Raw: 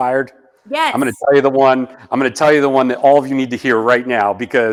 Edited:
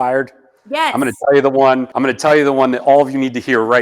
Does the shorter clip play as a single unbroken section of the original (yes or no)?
no